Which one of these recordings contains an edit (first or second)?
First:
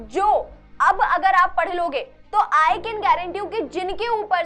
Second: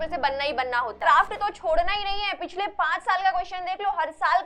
second